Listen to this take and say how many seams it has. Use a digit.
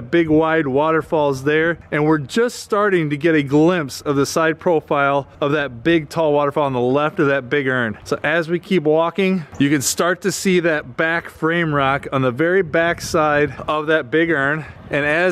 0